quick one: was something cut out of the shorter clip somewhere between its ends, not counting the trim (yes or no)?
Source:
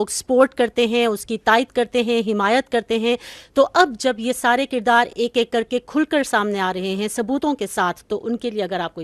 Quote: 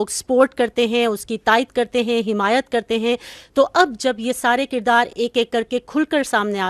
no